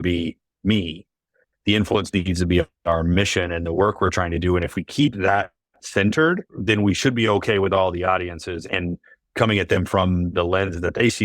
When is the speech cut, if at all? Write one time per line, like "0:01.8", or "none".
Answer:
0:06.6
0:08.6
0:10.3